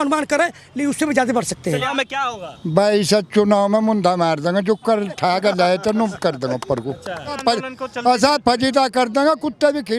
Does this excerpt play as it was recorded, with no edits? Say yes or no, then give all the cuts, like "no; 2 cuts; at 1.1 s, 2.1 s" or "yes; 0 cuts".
no; 2 cuts; at 1.9 s, 7.4 s